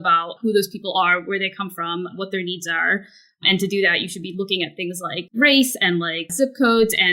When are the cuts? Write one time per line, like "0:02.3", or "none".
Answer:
0:05.3
0:06.2